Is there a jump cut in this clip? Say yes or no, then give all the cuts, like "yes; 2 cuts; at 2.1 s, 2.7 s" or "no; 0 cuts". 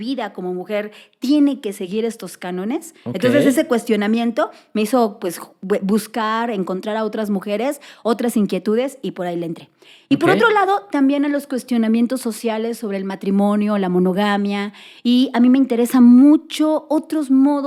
no; 0 cuts